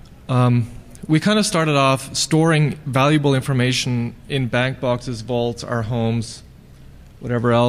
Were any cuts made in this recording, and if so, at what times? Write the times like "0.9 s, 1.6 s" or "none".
none